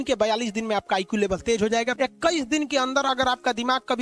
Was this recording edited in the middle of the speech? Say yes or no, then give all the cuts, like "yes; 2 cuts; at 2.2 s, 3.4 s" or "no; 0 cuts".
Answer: yes; 1 cut; at 1.9 s